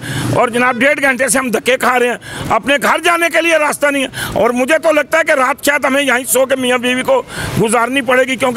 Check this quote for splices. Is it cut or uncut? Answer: uncut